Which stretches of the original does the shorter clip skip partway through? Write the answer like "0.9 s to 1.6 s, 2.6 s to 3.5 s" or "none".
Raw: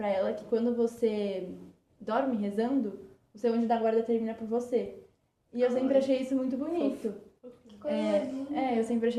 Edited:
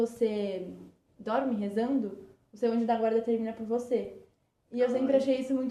none

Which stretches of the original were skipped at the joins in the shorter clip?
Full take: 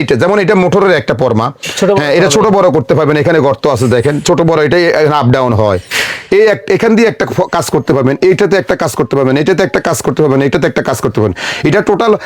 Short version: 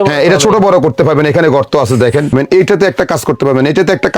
4.2 s to 8.0 s

